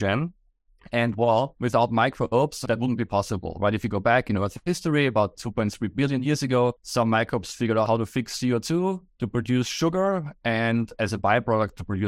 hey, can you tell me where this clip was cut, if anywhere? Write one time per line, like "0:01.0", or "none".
0:01.5
0:02.6
0:06.8
0:07.9
0:09.1